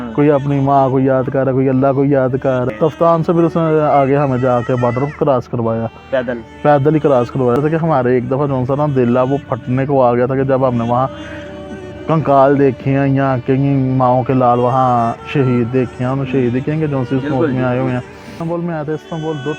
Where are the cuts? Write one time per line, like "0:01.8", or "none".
0:02.7
0:07.6
0:18.4